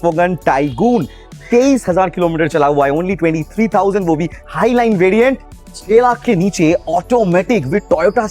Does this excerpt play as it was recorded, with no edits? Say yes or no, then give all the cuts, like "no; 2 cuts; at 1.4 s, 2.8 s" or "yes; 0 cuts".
no; 1 cut; at 5.5 s